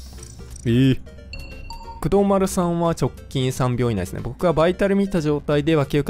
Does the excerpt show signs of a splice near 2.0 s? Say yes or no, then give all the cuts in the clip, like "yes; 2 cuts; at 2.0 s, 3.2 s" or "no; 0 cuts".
yes; 1 cut; at 2.0 s